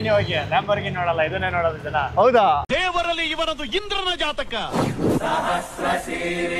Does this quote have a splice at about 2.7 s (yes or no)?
yes